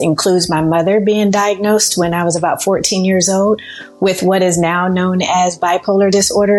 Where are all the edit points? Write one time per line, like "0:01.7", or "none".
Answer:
none